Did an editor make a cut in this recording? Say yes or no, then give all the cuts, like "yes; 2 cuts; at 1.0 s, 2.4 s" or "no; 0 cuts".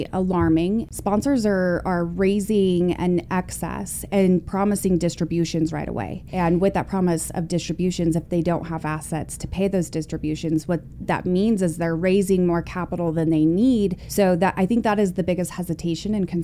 yes; 3 cuts; at 0.9 s, 6.2 s, 14.0 s